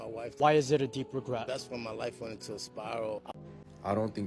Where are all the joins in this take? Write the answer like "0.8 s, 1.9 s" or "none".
3.3 s